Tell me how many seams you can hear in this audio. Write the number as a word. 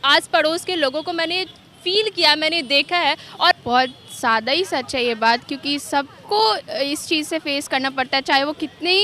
one